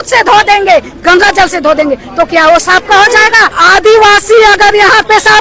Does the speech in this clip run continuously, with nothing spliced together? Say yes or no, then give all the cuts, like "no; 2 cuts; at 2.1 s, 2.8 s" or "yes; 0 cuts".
no; 1 cut; at 3.6 s